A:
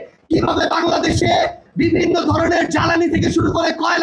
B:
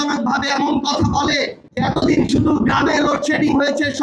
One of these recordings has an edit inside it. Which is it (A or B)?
B